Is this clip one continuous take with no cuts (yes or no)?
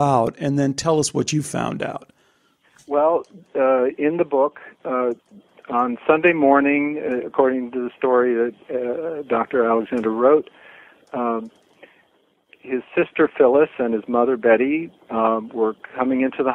yes